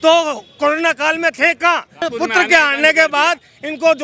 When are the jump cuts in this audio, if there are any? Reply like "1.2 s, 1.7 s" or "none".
2.0 s